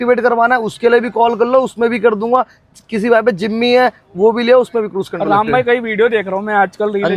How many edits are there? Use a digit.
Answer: 0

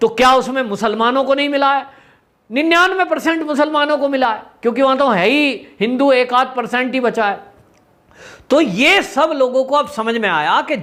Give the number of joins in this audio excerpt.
0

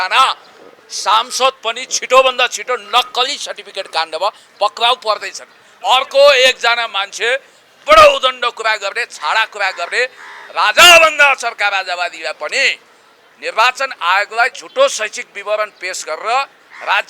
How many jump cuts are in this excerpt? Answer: 1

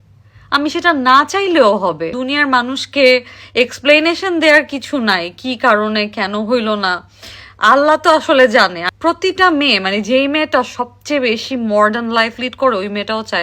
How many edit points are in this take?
2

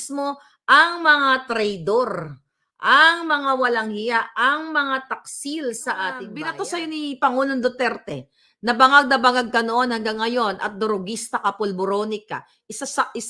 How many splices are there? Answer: 1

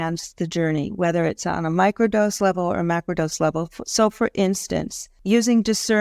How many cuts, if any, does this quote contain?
1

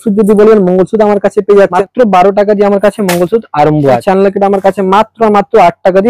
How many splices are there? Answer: 2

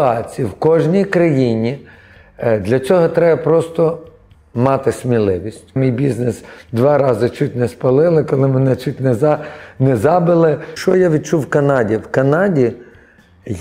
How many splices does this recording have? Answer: 2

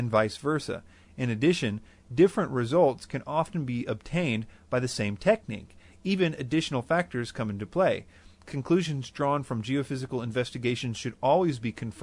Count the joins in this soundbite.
0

